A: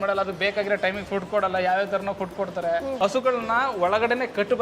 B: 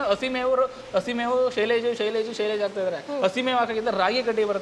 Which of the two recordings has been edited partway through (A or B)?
A